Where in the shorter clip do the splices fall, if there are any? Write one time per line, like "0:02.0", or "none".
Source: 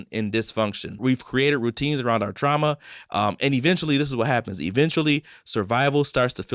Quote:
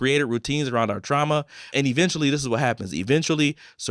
0:01.7